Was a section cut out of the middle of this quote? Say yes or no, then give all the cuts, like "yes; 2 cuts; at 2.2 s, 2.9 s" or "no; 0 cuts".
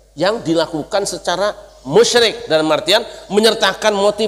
no; 0 cuts